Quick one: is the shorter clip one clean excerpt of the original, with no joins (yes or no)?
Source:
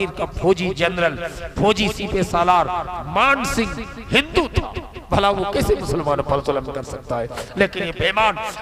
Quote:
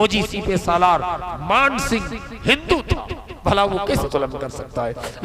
no